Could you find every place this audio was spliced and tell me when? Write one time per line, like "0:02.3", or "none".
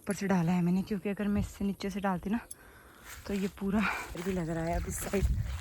0:04.2

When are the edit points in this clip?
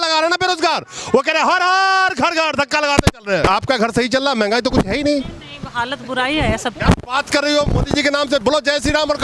0:03.5

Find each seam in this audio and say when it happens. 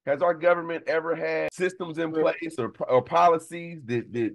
0:01.5

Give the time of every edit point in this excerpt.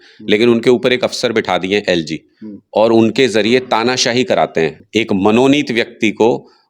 0:04.8

